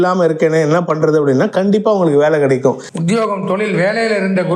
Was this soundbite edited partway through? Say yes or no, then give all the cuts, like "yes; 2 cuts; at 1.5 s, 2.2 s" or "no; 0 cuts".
yes; 1 cut; at 2.9 s